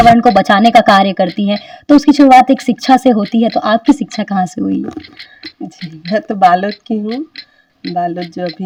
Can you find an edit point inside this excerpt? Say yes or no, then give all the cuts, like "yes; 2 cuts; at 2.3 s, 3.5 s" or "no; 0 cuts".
no; 0 cuts